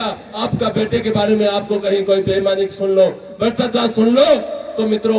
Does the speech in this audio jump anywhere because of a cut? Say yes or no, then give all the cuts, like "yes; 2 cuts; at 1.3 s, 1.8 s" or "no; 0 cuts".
no; 0 cuts